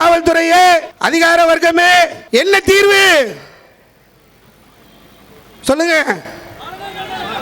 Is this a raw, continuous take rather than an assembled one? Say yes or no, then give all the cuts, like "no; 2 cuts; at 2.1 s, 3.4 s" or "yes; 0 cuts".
no; 2 cuts; at 1.0 s, 2.2 s